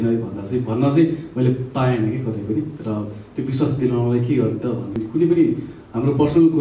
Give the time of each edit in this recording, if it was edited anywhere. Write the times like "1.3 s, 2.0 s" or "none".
5.0 s